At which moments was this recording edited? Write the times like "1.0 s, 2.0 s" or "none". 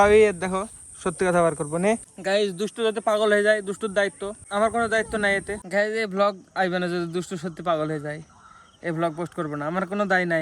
2.1 s, 5.6 s